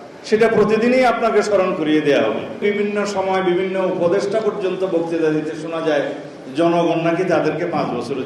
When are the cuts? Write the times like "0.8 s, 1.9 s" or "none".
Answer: 2.6 s